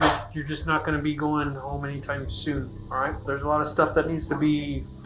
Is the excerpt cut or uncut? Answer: cut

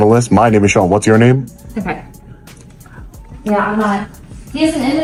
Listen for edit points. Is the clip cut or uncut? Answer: uncut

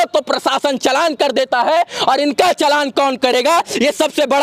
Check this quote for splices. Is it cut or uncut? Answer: uncut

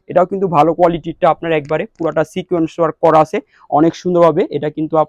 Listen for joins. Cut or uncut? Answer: uncut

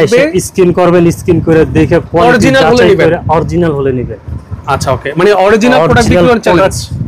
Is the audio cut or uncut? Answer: uncut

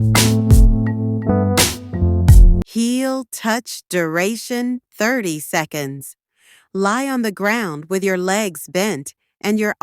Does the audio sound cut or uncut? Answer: cut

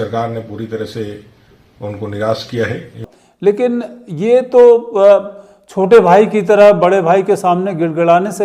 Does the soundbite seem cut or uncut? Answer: cut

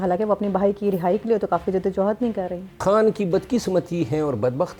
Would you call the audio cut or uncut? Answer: cut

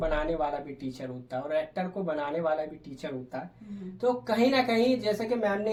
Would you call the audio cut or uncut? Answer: uncut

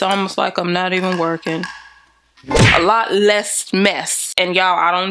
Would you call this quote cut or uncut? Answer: cut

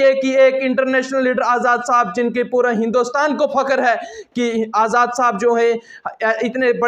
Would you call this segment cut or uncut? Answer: uncut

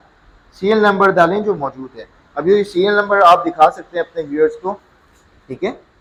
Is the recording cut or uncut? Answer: uncut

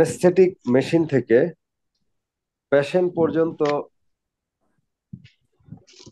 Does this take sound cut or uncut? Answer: uncut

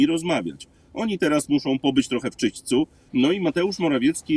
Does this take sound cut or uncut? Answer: cut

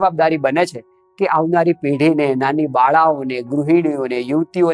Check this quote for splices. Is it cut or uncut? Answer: uncut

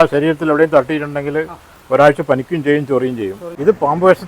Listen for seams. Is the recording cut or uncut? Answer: uncut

